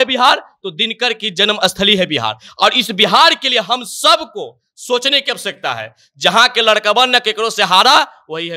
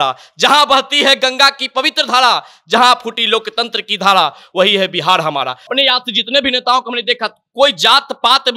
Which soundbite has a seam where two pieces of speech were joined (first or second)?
second